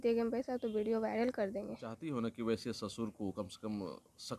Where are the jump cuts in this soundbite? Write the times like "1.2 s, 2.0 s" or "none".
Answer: 1.9 s